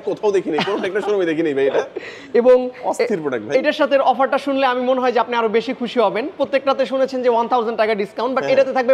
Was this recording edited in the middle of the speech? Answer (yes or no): no